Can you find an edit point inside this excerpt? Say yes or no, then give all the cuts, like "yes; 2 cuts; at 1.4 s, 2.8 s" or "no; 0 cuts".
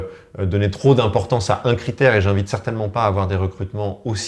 no; 0 cuts